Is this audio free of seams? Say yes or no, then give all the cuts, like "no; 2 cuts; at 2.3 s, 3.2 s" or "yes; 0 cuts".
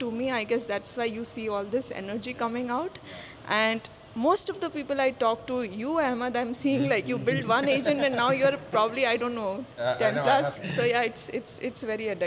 no; 1 cut; at 10.5 s